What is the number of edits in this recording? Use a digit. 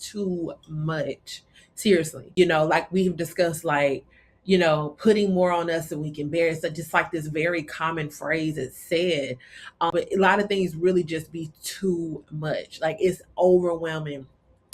2